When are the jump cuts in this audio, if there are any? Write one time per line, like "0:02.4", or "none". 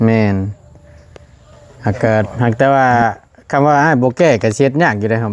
0:02.3